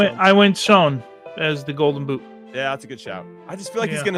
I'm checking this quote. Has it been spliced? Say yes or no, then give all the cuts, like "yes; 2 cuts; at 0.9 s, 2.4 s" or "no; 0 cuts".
no; 0 cuts